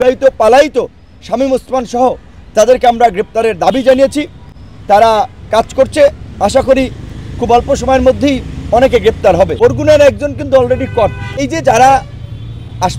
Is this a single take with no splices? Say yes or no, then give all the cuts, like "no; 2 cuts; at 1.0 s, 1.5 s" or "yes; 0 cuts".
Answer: no; 2 cuts; at 9.5 s, 11.5 s